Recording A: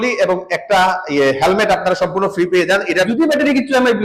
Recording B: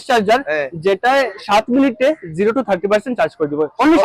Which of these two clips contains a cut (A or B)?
A